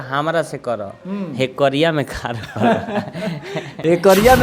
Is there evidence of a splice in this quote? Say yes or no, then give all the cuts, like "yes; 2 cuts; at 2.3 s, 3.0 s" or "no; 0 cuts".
no; 0 cuts